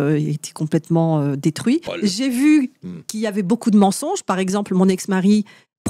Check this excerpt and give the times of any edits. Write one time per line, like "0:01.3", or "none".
0:01.9